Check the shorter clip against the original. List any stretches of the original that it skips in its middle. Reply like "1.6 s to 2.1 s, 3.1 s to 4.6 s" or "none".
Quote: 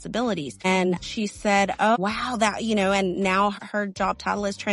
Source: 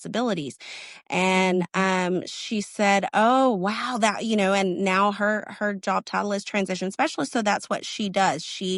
1.0 s to 2.3 s, 3.3 s to 3.6 s, 5.2 s to 5.4 s

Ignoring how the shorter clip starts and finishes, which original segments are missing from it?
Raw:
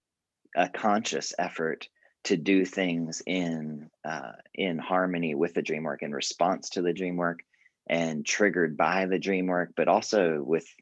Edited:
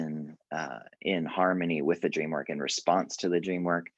none

